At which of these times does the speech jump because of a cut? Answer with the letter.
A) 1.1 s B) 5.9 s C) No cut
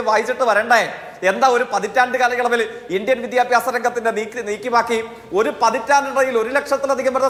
C